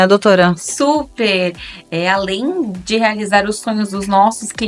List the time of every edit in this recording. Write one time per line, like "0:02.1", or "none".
none